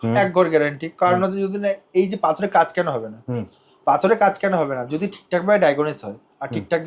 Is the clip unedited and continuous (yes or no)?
yes